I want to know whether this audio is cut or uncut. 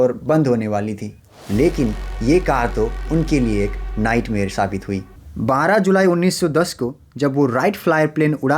cut